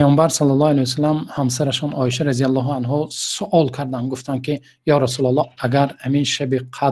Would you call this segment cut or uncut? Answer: uncut